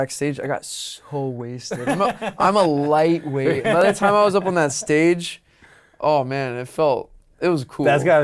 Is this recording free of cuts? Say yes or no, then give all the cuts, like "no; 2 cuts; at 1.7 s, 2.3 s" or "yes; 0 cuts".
yes; 0 cuts